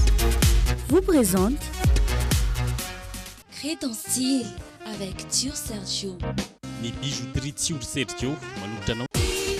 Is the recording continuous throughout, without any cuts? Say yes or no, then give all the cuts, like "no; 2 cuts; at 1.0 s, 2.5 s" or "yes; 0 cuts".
yes; 0 cuts